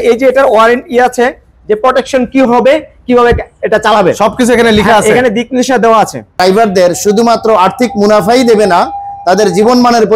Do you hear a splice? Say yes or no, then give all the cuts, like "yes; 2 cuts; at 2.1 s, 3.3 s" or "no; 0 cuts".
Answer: yes; 1 cut; at 6.4 s